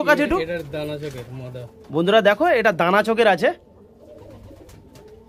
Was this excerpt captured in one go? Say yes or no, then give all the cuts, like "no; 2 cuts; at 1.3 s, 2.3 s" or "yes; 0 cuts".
yes; 0 cuts